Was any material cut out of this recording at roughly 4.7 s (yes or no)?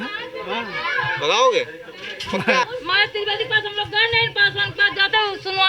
no